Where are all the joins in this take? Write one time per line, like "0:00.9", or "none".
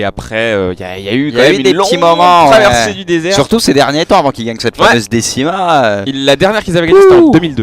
0:01.3